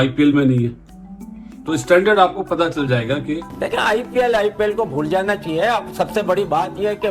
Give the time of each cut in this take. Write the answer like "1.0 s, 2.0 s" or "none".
3.6 s